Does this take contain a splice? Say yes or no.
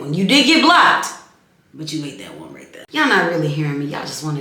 yes